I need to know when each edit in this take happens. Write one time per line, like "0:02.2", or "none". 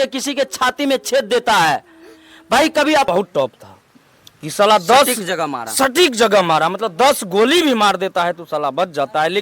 0:03.1